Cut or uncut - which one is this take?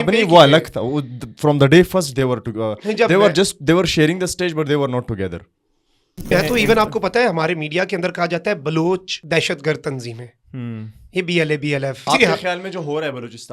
cut